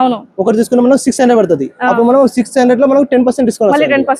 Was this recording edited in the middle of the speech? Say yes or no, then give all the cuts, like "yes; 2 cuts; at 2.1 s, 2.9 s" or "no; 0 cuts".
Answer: no; 0 cuts